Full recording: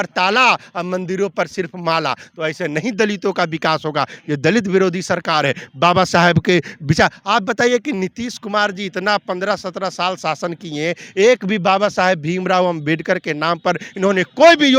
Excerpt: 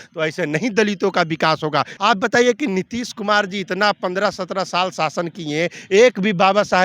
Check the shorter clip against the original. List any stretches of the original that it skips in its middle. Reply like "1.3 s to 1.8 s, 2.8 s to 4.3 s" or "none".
4.2 s to 7.2 s